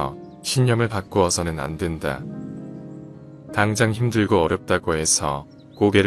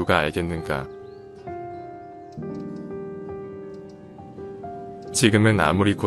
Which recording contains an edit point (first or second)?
second